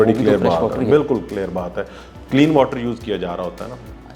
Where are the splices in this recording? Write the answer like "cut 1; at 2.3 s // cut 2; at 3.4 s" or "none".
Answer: none